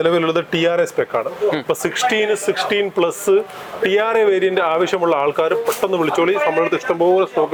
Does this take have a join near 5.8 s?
no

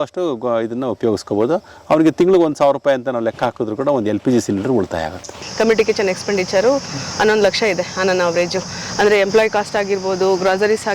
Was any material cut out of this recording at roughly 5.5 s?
yes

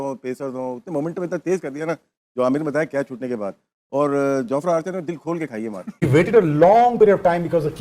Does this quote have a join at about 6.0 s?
yes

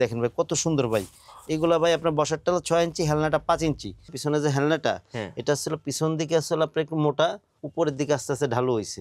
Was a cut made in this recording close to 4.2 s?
yes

